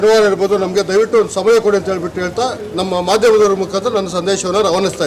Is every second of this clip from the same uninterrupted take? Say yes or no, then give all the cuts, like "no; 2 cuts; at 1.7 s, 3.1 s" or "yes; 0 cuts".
yes; 0 cuts